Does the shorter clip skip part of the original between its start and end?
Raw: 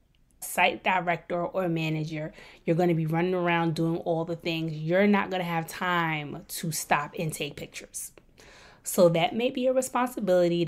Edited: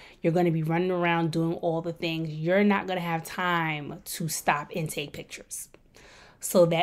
no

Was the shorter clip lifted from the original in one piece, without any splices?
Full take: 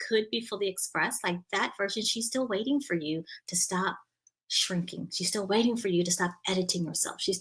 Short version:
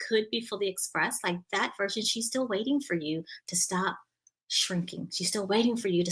yes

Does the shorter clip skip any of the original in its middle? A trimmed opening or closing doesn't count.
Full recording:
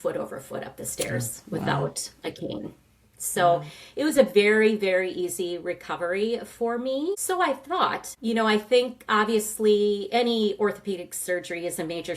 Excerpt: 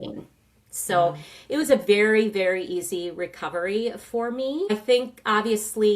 yes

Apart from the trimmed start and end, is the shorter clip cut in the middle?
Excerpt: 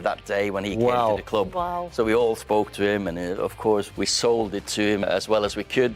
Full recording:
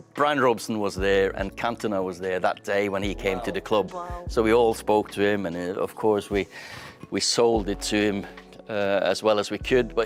yes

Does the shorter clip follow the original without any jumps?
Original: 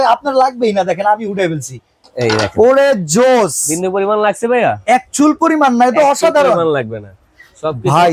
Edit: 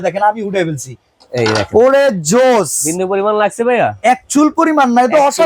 yes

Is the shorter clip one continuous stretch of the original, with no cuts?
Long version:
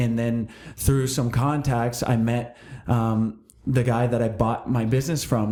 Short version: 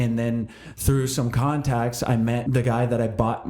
no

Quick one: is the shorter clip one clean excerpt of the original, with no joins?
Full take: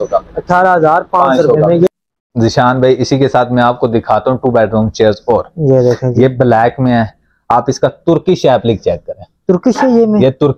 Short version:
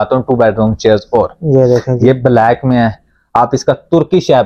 yes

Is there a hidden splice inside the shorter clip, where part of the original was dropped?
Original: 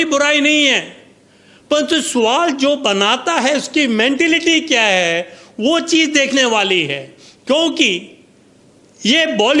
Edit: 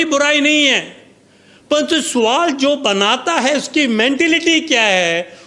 no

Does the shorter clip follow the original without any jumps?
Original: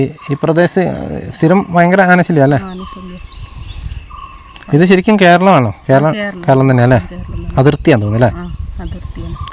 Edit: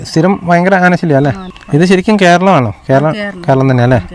no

